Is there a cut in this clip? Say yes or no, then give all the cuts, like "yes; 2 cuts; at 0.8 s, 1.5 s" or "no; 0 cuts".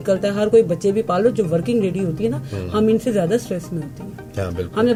no; 0 cuts